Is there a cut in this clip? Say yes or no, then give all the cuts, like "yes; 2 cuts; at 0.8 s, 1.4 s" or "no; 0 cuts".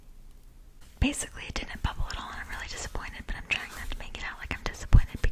no; 0 cuts